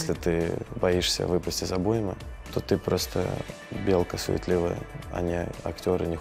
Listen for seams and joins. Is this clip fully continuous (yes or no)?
yes